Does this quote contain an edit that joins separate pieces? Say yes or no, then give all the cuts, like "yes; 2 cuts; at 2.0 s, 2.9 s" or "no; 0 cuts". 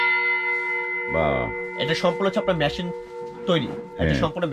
no; 0 cuts